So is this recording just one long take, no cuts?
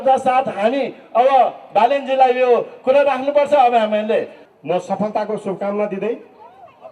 no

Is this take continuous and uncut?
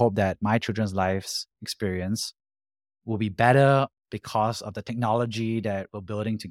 yes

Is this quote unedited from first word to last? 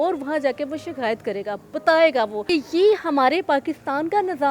no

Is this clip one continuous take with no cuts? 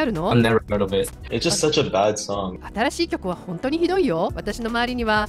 no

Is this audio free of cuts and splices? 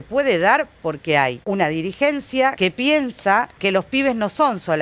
no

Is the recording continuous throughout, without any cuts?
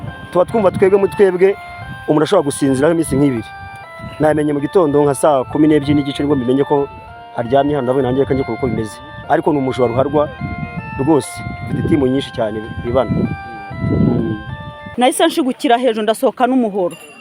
no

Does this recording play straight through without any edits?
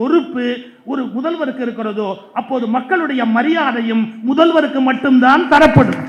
yes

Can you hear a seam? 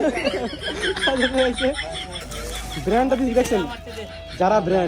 yes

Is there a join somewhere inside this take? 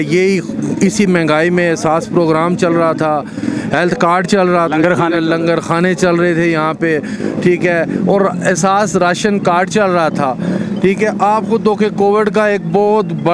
no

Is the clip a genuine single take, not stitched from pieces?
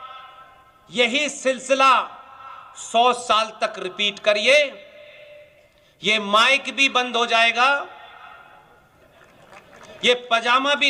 yes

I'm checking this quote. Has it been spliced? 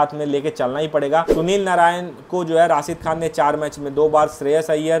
yes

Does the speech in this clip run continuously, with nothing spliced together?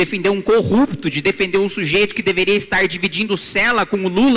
yes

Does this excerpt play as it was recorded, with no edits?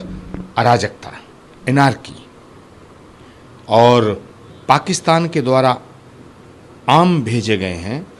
yes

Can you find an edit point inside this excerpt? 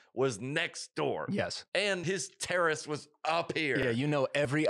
yes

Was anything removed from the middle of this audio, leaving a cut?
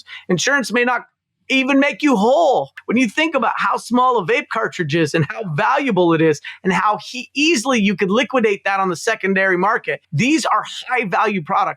yes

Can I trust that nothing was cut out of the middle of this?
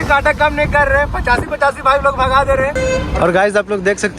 no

